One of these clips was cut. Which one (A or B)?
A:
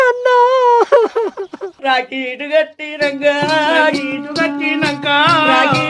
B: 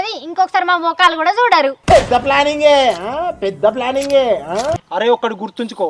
B